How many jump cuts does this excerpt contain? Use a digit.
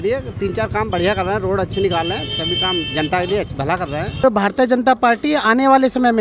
1